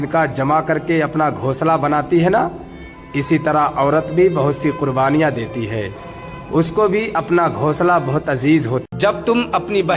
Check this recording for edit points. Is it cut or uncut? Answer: uncut